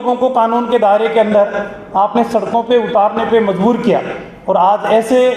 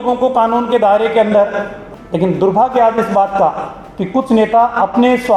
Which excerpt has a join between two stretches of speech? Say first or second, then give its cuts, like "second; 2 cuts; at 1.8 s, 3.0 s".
second; 1 cut; at 1.8 s